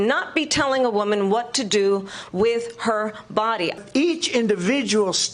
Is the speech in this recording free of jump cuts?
no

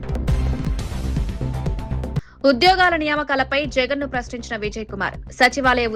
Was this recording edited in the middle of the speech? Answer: yes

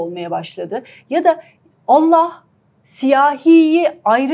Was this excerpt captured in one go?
yes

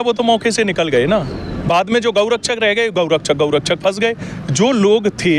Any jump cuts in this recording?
no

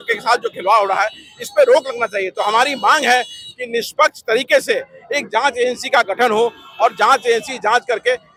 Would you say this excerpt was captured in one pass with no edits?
yes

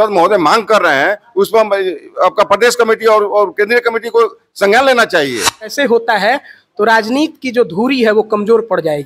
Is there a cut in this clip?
yes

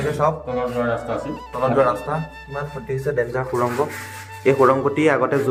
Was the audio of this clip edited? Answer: no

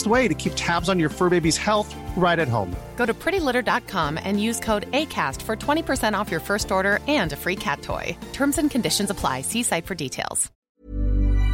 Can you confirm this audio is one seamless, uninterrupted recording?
no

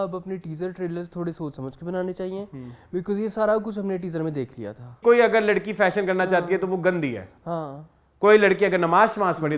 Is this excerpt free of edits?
no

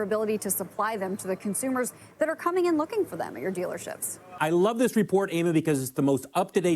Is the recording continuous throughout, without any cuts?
no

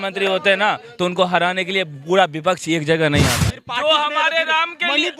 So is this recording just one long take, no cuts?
no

